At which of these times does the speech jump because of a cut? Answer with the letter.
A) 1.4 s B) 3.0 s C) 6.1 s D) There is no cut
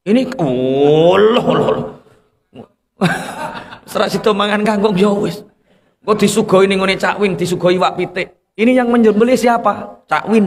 D